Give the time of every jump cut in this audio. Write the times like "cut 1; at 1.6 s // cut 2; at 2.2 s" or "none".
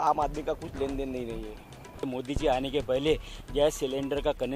cut 1; at 2.1 s